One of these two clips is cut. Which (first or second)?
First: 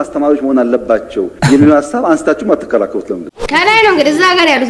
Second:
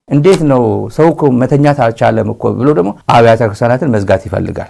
first